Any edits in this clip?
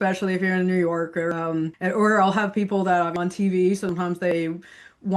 yes; 3 cuts; at 1.3 s, 3.1 s, 4.2 s

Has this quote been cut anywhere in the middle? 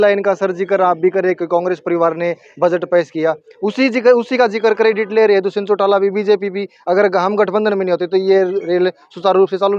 no; 0 cuts

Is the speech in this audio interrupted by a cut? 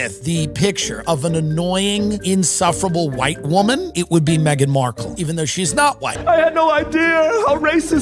yes; 1 cut; at 6.1 s

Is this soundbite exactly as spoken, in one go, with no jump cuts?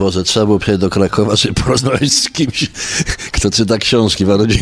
yes; 0 cuts

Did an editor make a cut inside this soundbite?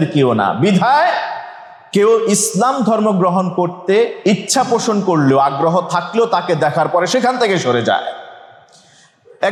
no; 0 cuts

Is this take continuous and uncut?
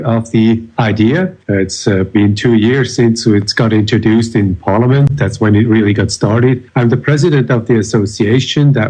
no; 1 cut; at 1.4 s

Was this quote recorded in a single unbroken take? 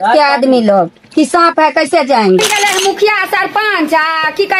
no; 1 cut; at 2.4 s

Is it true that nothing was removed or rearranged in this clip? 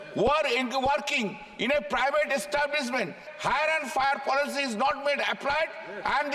no; 1 cut; at 3.2 s

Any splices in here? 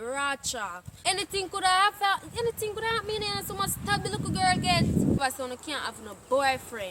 yes; 2 cuts; at 0.9 s, 5.2 s

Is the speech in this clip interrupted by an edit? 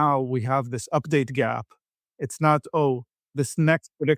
no; 0 cuts

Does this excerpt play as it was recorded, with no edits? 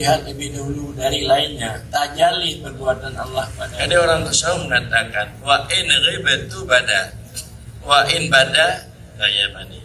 no; 1 cut; at 3.5 s

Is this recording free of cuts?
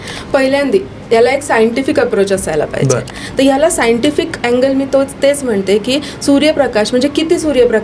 no; 1 cut; at 3.2 s

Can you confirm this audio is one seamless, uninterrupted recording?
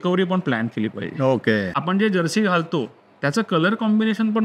no; 1 cut; at 1.8 s

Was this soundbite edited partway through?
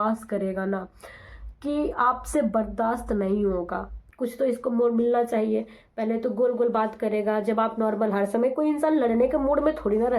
yes; 1 cut; at 4.0 s

